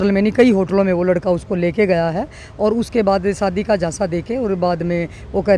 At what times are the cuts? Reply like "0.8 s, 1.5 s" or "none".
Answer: none